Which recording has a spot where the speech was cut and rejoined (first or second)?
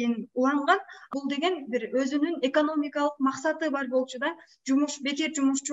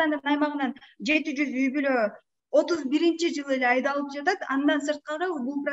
first